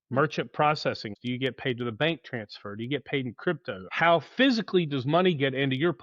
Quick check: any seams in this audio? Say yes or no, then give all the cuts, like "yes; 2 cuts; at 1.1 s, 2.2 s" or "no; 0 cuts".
yes; 2 cuts; at 1.1 s, 3.8 s